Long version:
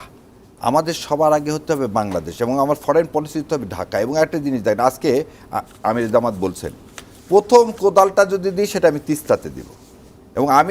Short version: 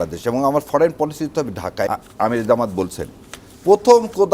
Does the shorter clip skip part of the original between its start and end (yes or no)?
yes